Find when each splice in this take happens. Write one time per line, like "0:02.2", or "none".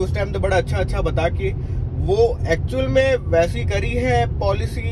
none